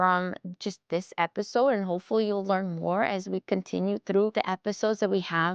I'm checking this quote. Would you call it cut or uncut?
uncut